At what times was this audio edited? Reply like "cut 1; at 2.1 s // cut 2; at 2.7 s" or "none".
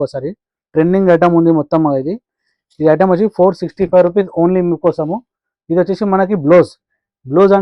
none

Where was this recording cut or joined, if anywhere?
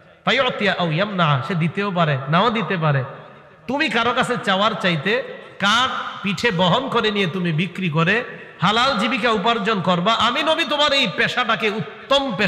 none

